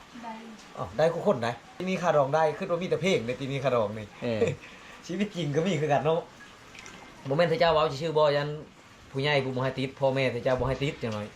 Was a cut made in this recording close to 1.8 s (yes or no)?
yes